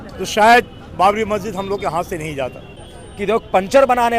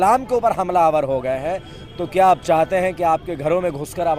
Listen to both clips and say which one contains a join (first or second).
first